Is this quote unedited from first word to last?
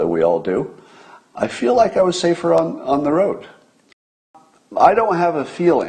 no; 1 cut; at 4.0 s

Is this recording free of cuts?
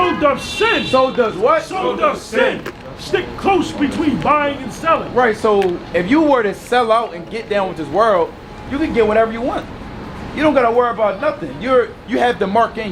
yes; 0 cuts

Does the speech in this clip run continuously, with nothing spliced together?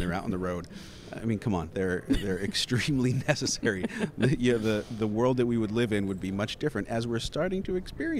yes; 0 cuts

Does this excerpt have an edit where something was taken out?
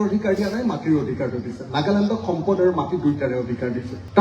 no; 0 cuts

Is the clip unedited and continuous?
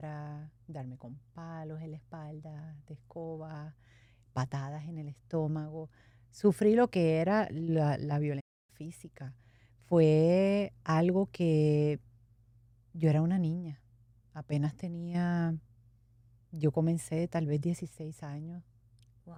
yes; 0 cuts

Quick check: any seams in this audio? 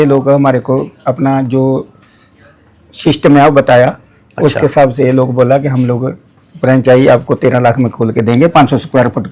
no; 0 cuts

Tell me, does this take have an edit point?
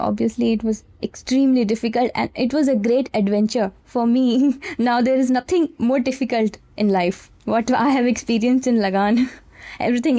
yes; 2 cuts; at 3.8 s, 7.3 s

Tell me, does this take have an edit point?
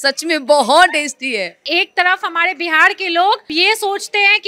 yes; 2 cuts; at 1.6 s, 3.5 s

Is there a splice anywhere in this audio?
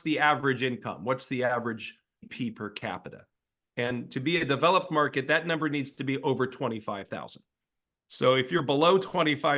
no; 0 cuts

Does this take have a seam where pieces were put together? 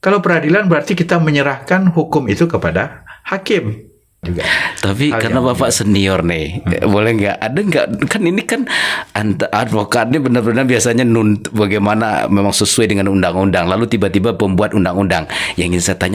yes; 1 cut; at 4.2 s

